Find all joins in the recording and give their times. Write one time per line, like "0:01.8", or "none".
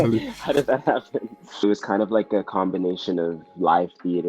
0:01.6

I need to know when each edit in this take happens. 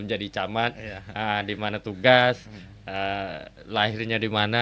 none

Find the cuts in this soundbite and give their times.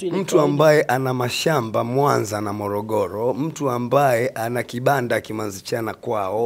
none

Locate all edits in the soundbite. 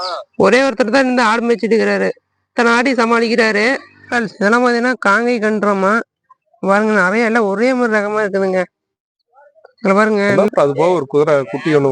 0:03.9
0:10.3

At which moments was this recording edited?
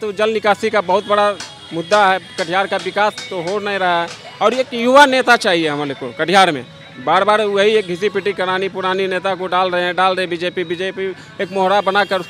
none

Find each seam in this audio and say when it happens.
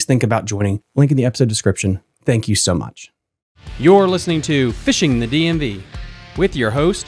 0:03.6

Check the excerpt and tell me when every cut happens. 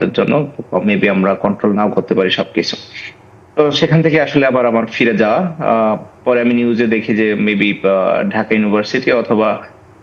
none

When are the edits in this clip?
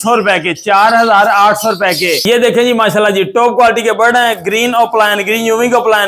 0:02.2

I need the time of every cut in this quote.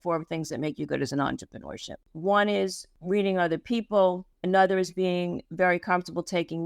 0:02.1
0:02.9
0:04.3

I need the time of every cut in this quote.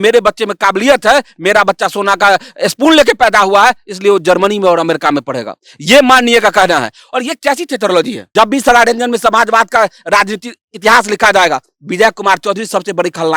0:08.2

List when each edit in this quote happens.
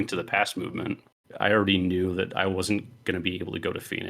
0:01.0

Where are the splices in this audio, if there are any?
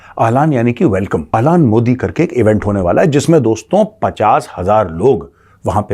0:01.3

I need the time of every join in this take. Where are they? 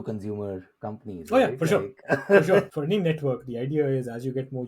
0:02.7

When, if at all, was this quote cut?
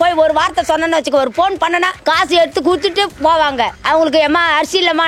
0:01.9
0:03.1
0:03.8

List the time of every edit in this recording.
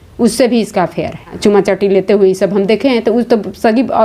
0:01.3

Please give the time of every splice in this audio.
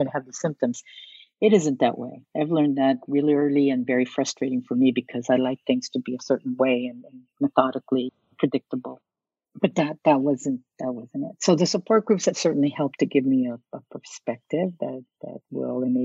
none

